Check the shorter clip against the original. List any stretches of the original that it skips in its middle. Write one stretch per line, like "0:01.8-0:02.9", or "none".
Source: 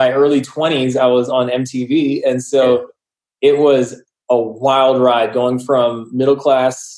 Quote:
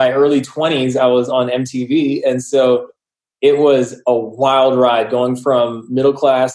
0:03.9-0:04.2